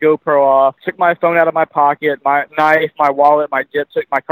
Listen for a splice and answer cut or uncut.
cut